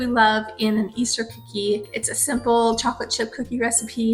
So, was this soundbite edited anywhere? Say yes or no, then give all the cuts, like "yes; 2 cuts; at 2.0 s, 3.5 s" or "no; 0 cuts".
yes; 1 cut; at 2.0 s